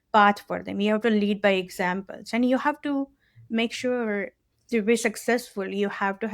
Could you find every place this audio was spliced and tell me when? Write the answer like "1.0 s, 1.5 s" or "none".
4.4 s

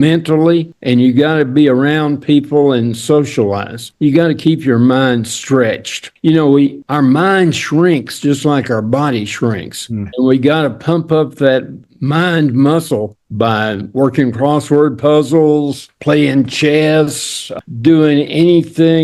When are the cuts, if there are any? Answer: 17.5 s

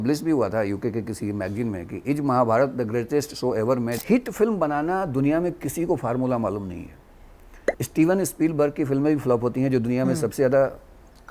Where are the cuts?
4.0 s

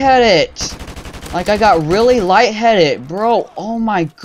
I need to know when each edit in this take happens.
none

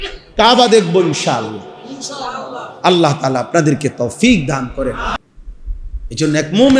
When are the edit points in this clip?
5.2 s

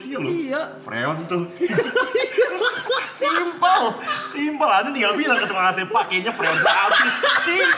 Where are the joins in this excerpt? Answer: none

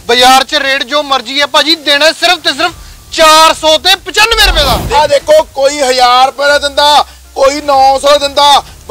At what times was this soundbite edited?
4.8 s

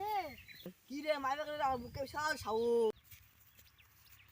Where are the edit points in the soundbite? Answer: 2.9 s

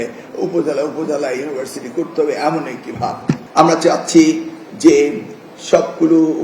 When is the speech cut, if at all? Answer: 3.4 s

